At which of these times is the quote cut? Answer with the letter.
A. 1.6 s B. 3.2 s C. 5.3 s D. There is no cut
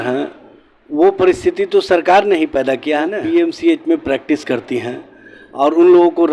B